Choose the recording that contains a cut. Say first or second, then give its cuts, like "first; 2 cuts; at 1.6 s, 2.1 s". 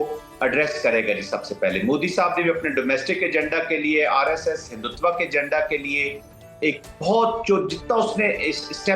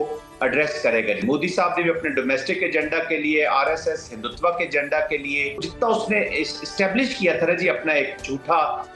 second; 2 cuts; at 1.2 s, 5.7 s